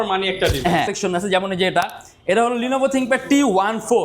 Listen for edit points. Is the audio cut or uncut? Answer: cut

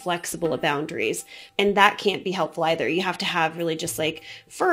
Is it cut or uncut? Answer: cut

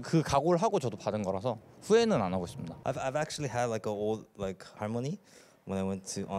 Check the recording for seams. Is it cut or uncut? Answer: cut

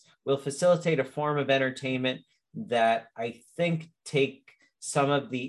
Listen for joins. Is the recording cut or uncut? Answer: uncut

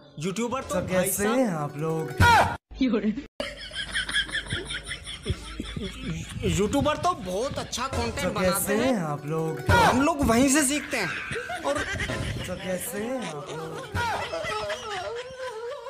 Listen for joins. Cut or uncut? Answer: uncut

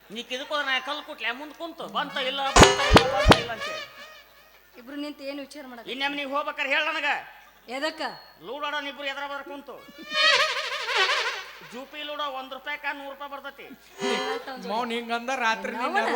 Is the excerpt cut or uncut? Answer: uncut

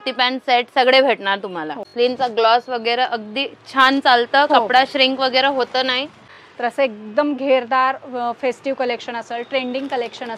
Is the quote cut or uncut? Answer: cut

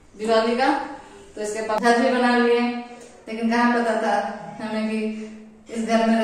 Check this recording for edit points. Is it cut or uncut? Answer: cut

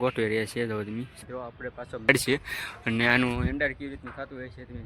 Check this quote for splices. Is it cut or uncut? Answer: cut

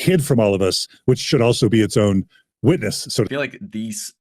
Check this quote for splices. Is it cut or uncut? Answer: cut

